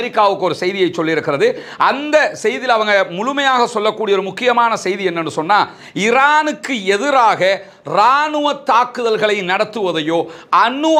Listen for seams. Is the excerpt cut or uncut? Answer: uncut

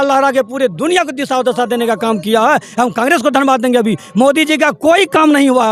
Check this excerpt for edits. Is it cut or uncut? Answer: uncut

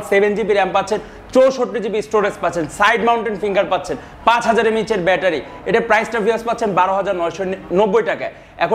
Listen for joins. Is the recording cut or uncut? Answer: uncut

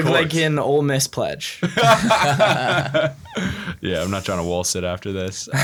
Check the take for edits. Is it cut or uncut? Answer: uncut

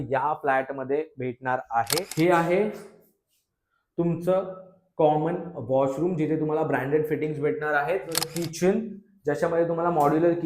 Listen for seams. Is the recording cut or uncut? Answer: cut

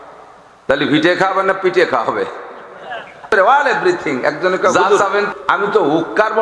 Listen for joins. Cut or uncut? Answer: cut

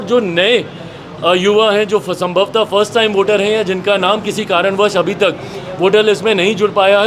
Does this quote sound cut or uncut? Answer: uncut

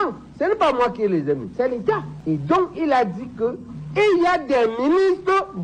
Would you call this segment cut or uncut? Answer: uncut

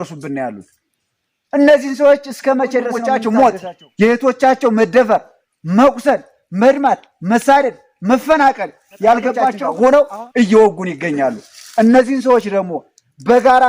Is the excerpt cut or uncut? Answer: cut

